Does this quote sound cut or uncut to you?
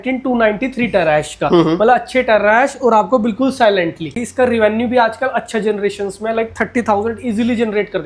cut